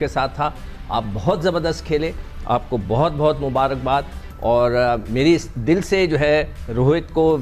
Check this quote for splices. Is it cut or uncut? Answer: uncut